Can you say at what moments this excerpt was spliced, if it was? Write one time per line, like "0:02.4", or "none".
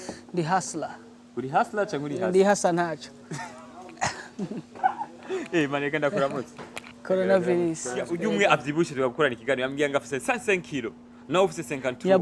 0:08.2